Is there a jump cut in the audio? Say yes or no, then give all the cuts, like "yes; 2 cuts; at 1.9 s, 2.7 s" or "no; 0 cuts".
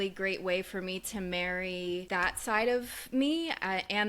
yes; 1 cut; at 2.1 s